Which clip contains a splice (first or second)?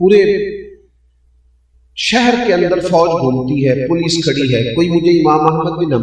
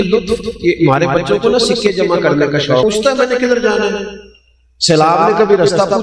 second